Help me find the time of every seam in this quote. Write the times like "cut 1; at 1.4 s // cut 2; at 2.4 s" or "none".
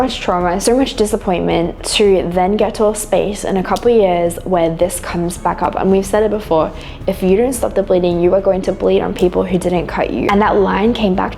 cut 1; at 10.3 s

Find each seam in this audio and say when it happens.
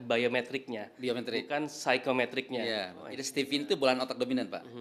cut 1; at 3.0 s

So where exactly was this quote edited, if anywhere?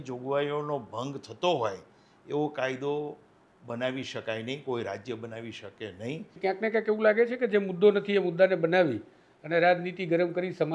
cut 1; at 6.3 s

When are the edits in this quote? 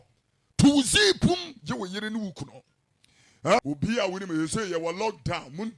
cut 1; at 3.6 s

